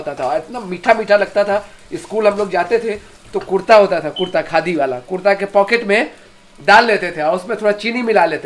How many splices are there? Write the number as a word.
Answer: zero